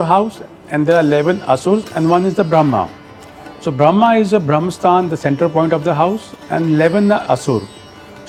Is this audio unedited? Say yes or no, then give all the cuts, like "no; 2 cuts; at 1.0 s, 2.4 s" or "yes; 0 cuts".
yes; 0 cuts